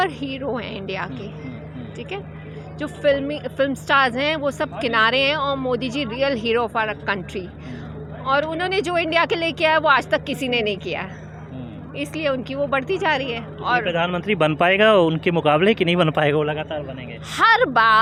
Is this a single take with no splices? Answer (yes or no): yes